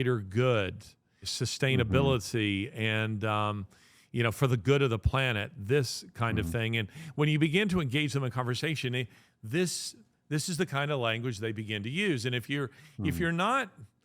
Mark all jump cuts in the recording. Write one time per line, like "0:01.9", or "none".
0:01.3